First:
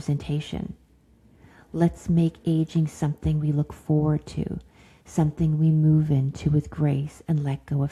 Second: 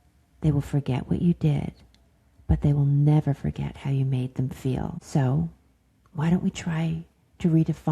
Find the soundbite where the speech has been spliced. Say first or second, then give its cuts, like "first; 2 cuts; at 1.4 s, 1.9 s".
second; 1 cut; at 5.0 s